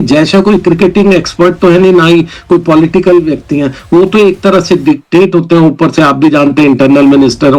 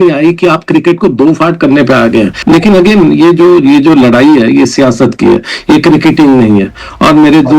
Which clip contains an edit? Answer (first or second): second